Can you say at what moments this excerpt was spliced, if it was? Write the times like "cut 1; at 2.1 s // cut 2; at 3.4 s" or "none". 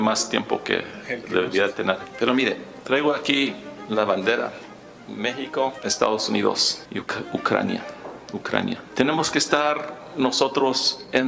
cut 1; at 2.1 s // cut 2; at 5.8 s // cut 3; at 6.8 s // cut 4; at 8.9 s

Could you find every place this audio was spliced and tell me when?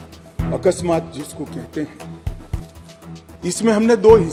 none

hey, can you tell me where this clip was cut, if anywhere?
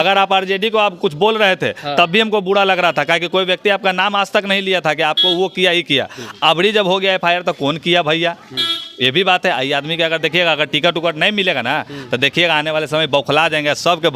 none

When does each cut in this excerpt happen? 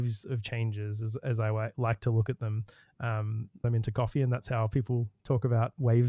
cut 1; at 3.7 s

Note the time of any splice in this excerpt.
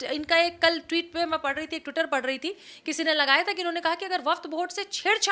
none

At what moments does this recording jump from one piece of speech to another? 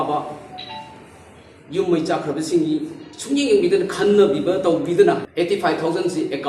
cut 1; at 5.3 s

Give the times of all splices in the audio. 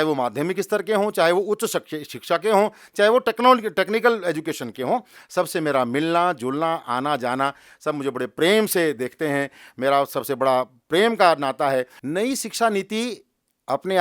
cut 1; at 12.0 s

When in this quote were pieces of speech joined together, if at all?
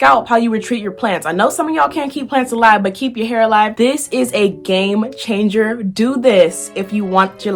cut 1; at 3.7 s

